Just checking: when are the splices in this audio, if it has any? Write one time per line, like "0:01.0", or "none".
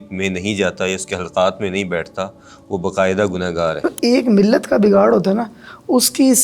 0:03.9